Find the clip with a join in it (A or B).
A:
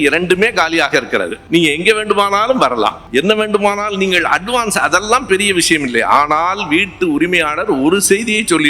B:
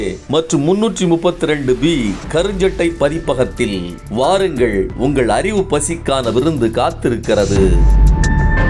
A